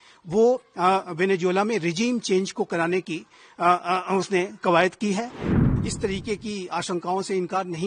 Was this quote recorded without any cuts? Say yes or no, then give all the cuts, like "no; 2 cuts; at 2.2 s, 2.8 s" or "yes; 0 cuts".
no; 1 cut; at 5.5 s